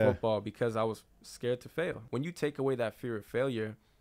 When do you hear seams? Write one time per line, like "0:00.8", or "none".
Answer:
0:02.0